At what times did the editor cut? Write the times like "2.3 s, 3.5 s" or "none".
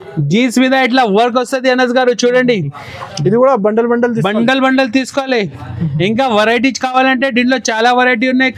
none